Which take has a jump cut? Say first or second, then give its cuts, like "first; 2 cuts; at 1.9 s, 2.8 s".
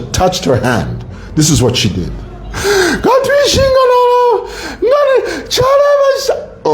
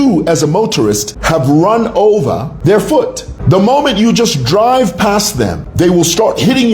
second; 4 cuts; at 1.1 s, 2.5 s, 3.3 s, 5.6 s